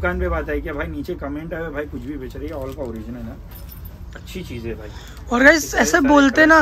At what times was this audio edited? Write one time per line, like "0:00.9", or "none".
none